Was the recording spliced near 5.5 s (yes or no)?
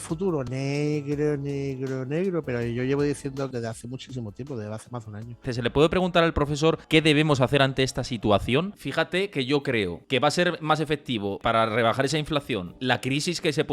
yes